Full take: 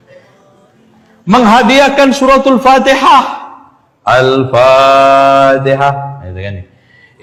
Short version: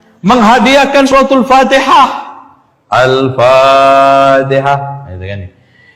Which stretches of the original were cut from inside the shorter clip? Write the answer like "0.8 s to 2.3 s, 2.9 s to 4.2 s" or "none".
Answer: 2.1 s to 2.2 s

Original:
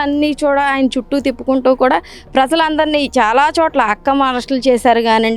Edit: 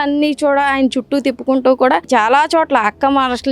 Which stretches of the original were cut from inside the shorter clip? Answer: 2.0 s to 3.1 s

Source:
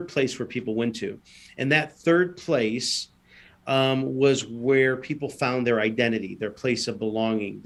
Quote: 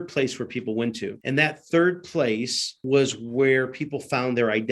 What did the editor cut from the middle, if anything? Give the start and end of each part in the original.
1.1 s to 1.5 s, 3.2 s to 4.1 s

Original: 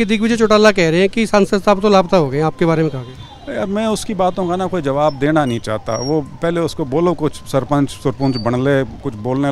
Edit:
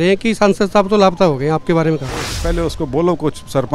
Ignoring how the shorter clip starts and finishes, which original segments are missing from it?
3.3 s to 6.3 s

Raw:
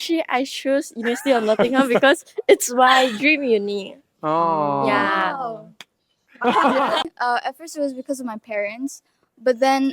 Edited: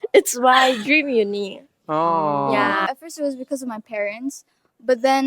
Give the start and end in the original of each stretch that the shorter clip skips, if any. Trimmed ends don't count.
5.2 s to 7.4 s

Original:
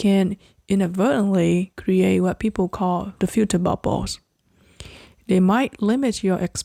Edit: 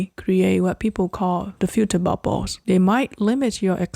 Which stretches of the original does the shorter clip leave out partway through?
4.1 s to 5.1 s

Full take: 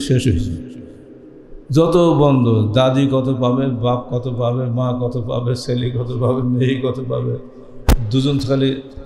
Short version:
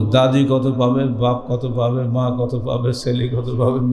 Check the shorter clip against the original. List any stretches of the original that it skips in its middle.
none

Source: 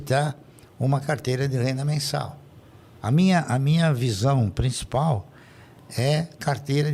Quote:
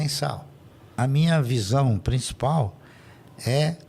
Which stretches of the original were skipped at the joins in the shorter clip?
2.9 s to 3.5 s

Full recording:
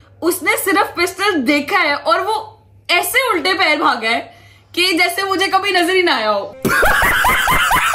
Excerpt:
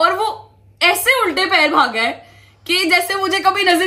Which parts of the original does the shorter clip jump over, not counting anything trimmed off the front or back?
none

